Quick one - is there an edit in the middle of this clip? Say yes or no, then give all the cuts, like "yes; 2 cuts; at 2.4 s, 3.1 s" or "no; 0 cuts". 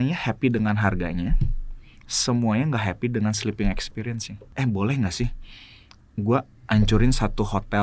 yes; 1 cut; at 4.4 s